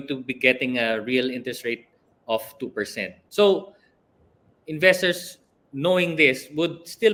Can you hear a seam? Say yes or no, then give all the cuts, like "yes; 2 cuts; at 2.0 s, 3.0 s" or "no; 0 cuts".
no; 0 cuts